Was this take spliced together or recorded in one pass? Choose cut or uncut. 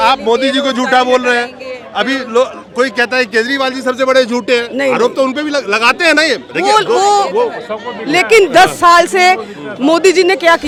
uncut